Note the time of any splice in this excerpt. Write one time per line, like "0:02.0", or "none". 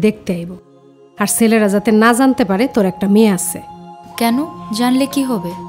none